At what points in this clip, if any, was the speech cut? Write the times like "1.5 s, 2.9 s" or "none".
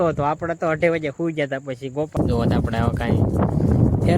2.1 s